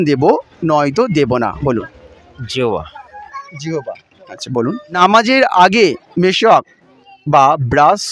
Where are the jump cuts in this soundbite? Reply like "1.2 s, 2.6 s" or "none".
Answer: 5.0 s